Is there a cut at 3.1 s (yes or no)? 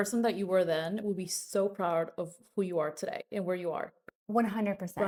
no